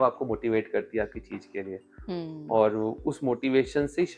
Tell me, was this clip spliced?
no; 0 cuts

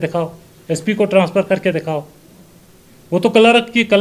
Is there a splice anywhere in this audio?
no; 0 cuts

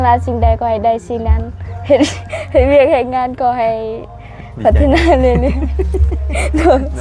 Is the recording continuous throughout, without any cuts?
yes; 0 cuts

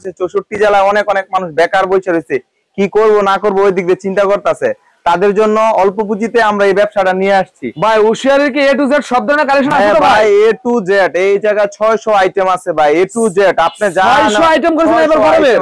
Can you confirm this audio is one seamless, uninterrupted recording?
yes; 0 cuts

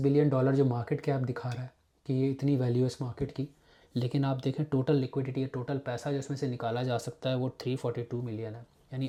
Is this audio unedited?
yes; 0 cuts

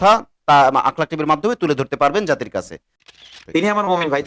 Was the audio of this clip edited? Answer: yes; 1 cut; at 2.9 s

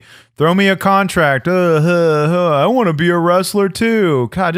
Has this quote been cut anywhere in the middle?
no; 0 cuts

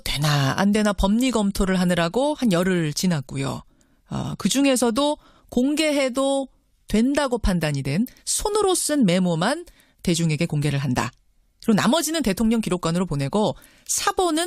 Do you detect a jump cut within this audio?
no; 0 cuts

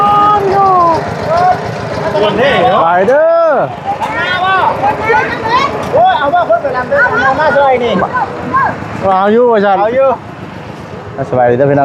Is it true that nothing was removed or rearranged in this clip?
yes; 0 cuts

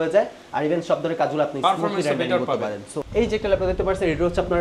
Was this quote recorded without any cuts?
no; 1 cut; at 2.9 s

